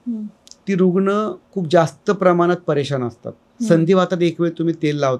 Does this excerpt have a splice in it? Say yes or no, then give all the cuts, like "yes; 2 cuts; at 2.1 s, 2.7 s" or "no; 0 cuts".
no; 0 cuts